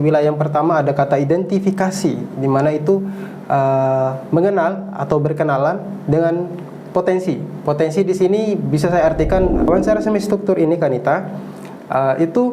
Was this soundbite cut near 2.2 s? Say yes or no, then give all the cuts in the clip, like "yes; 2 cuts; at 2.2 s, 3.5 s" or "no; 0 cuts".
no; 1 cut; at 9.6 s